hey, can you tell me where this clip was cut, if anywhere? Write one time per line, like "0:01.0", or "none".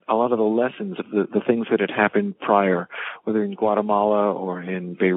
none